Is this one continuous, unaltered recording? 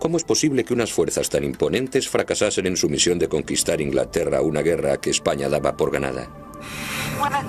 yes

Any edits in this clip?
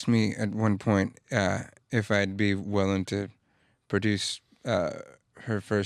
no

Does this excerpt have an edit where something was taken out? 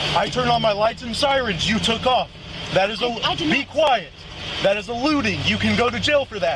no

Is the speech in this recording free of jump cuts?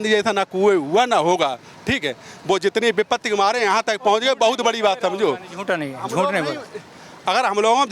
yes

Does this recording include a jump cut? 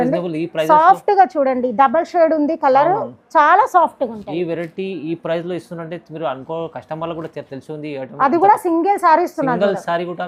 no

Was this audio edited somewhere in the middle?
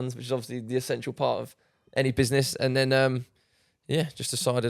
no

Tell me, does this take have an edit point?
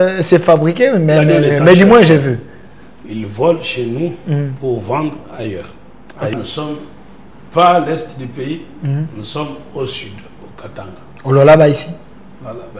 yes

